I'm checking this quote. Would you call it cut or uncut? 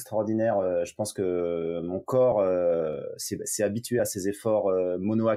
uncut